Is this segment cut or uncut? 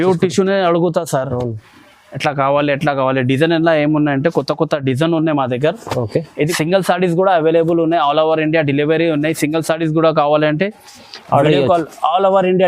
cut